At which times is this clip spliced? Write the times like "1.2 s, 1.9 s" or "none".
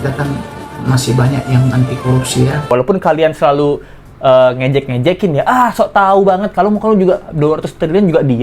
2.7 s